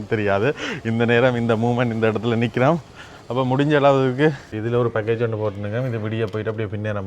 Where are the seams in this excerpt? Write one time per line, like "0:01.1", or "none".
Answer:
0:04.5